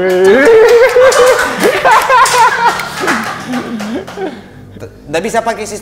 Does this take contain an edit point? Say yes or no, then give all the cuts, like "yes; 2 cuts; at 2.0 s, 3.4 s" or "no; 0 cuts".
no; 0 cuts